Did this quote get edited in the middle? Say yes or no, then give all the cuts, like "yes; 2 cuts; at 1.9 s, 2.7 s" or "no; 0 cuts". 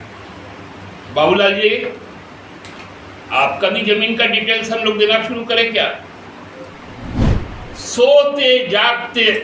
yes; 1 cut; at 7.2 s